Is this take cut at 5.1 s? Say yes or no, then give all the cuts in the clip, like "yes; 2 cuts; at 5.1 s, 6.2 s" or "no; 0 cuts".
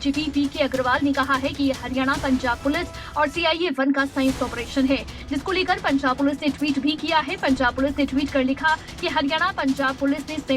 yes; 1 cut; at 5.1 s